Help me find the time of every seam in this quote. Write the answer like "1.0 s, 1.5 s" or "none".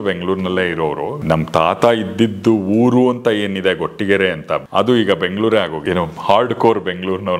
1.1 s, 4.6 s, 5.8 s